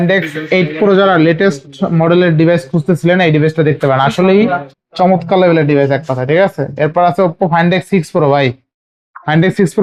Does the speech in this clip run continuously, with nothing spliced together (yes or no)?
yes